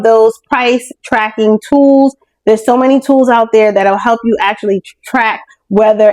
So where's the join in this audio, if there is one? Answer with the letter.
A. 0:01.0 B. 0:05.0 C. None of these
C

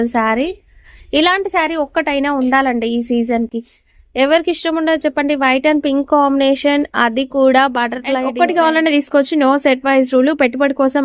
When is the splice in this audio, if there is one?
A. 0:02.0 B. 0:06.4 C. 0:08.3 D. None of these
C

